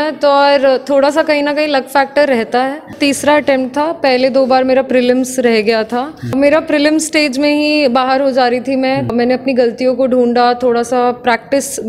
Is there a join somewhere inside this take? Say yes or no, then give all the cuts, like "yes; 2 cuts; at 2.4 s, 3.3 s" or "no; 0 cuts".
yes; 3 cuts; at 3.0 s, 6.3 s, 9.1 s